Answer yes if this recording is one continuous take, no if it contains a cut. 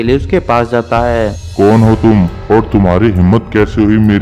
no